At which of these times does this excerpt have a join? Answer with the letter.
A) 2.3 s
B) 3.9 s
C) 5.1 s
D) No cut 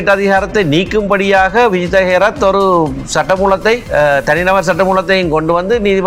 B